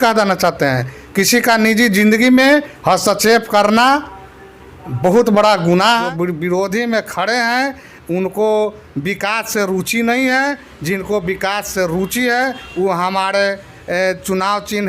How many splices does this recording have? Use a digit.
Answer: 1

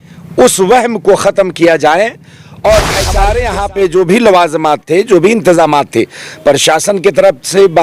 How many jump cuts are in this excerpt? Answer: 1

